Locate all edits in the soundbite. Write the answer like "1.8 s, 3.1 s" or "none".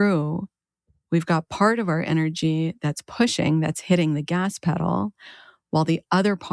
none